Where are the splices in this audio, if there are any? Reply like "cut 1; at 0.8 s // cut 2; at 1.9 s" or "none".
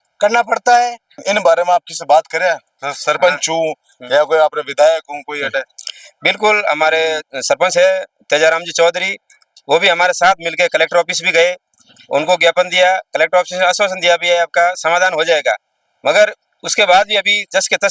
none